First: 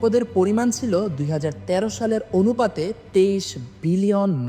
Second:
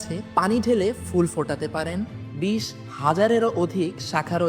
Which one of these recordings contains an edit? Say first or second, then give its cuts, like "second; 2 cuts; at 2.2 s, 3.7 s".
second; 1 cut; at 2.2 s